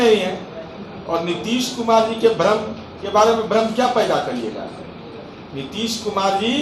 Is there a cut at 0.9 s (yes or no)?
no